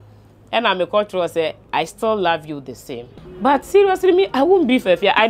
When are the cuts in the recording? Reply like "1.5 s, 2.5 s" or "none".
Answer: 3.1 s